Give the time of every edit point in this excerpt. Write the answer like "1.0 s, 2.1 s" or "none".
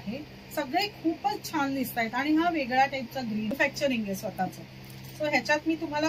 3.5 s